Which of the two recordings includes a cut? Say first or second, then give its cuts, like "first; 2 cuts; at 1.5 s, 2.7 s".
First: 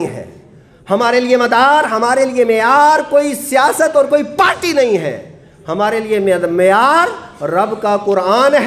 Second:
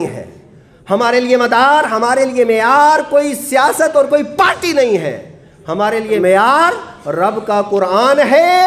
second; 1 cut; at 6.2 s